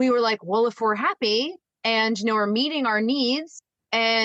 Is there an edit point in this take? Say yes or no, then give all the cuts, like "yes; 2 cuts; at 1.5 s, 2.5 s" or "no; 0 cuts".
no; 0 cuts